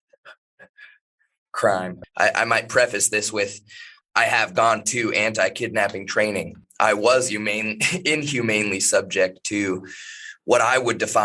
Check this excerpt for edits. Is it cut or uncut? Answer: cut